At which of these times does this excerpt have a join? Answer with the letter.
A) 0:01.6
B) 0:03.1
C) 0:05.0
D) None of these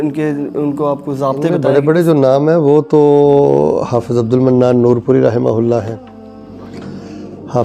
A